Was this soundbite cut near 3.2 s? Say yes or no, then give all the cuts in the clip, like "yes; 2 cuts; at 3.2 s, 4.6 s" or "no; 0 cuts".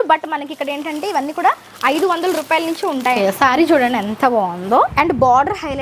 yes; 2 cuts; at 3.2 s, 4.9 s